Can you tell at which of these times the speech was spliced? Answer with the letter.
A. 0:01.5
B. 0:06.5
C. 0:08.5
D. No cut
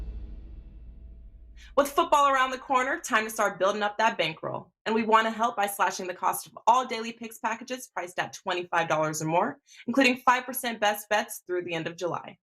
A